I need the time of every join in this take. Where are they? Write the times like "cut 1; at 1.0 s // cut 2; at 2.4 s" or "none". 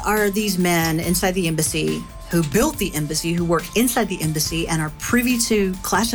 cut 1; at 4.4 s